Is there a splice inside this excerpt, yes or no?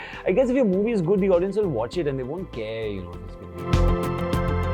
yes